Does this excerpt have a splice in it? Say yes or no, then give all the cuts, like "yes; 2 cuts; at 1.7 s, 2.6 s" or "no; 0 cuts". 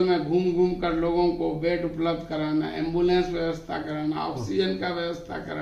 no; 0 cuts